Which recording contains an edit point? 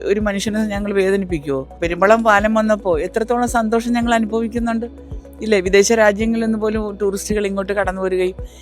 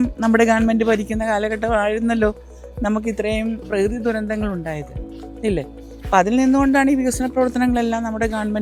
first; 1 cut; at 1.8 s

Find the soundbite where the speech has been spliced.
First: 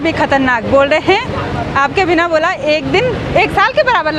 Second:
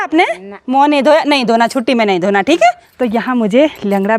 second; 1 cut; at 2.9 s

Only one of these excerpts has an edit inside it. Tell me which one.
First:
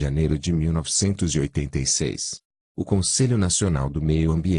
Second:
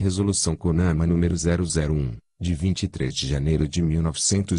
second; 1 cut; at 2.0 s

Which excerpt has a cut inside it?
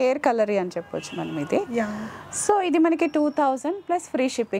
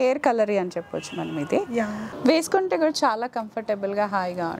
second; 1 cut; at 2.1 s

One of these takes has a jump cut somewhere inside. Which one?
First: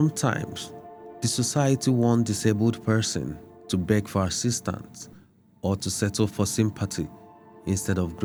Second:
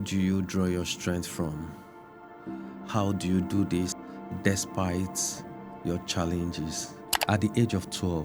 second; 2 cuts; at 4.0 s, 7.1 s

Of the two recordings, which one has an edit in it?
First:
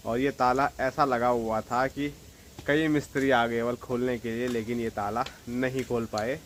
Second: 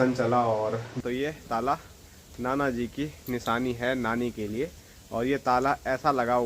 second; 1 cut; at 1.0 s

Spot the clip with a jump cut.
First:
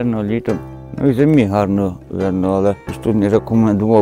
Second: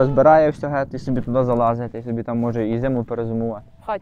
first; 1 cut; at 2.9 s

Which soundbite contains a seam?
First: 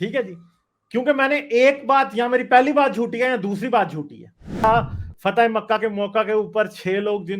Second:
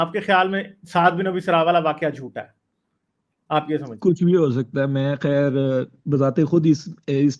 first; 1 cut; at 4.6 s

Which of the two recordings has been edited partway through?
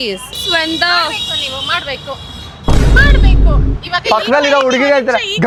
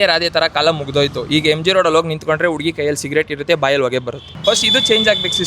second; 1 cut; at 4.3 s

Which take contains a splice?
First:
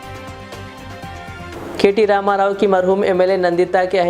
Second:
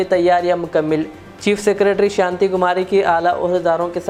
first; 1 cut; at 1.5 s

